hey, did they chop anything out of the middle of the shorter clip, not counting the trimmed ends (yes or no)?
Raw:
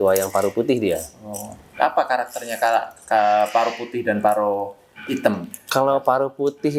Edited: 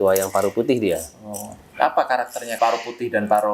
yes